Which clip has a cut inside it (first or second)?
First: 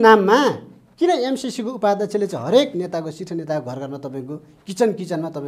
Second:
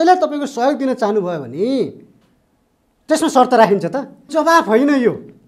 second